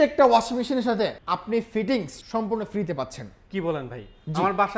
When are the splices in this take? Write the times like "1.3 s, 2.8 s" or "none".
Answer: 1.2 s, 2.2 s